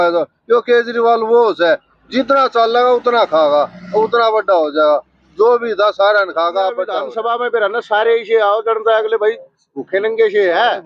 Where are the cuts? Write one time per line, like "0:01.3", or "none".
0:07.0